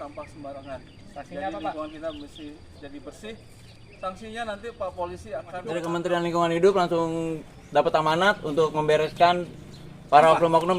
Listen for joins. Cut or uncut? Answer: cut